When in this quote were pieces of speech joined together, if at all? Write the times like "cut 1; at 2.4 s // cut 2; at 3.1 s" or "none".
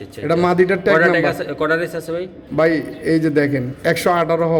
none